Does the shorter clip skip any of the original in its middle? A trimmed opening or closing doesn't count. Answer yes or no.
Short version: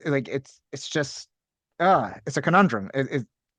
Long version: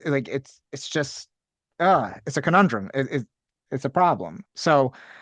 no